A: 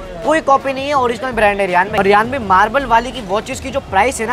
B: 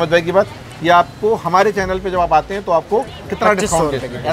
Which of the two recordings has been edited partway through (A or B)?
A